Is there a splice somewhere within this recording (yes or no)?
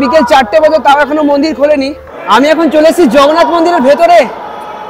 yes